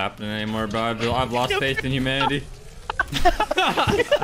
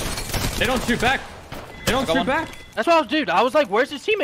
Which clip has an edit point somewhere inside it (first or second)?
second